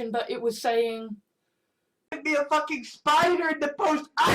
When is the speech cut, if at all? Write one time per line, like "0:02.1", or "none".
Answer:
0:02.1